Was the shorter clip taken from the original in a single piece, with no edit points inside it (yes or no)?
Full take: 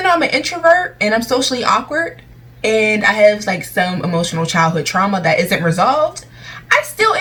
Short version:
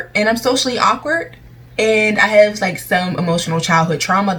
yes